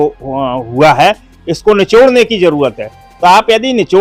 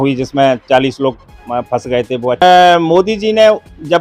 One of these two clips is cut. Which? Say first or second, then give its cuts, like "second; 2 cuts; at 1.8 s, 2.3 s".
second; 1 cut; at 2.4 s